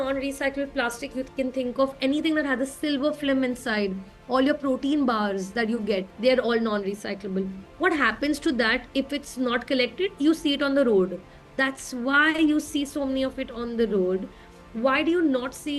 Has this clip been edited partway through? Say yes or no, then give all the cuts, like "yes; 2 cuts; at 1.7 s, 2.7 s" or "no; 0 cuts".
yes; 1 cut; at 6.1 s